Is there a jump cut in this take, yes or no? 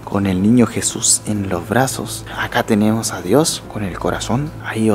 no